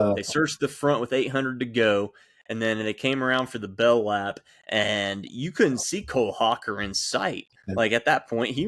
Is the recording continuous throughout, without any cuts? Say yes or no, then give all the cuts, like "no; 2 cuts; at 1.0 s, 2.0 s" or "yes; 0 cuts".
yes; 0 cuts